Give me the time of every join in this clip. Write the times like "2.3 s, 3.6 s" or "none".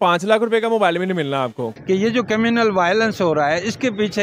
1.7 s